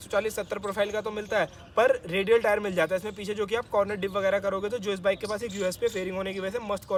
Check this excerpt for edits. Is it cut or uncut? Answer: uncut